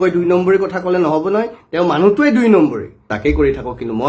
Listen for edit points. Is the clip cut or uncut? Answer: cut